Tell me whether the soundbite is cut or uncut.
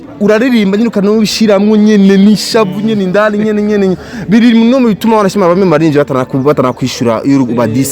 uncut